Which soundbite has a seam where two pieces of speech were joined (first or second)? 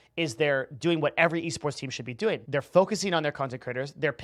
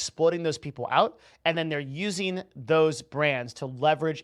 first